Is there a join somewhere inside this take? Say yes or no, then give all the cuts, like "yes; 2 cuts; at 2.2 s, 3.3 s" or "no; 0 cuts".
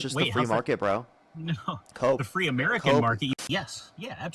yes; 1 cut; at 3.3 s